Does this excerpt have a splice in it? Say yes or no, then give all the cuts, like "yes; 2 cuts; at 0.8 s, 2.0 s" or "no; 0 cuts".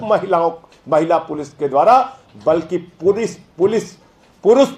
no; 0 cuts